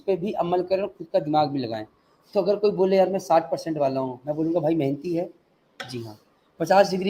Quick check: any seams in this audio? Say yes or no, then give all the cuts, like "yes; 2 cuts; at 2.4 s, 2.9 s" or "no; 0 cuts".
no; 0 cuts